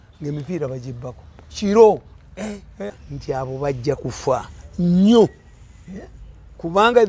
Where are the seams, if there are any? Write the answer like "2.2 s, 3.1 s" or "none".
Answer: 3.0 s